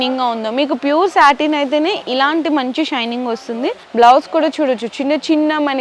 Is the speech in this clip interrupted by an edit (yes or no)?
yes